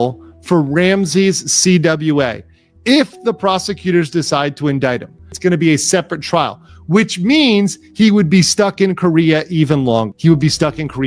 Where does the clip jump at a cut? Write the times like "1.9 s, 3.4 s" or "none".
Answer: 5.3 s, 10.1 s